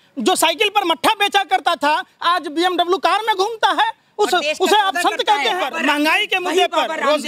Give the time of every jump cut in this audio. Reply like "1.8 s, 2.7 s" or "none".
5.7 s